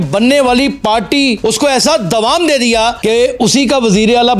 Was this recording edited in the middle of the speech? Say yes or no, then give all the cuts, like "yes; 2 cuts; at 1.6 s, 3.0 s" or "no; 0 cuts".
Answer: yes; 2 cuts; at 1.4 s, 3.0 s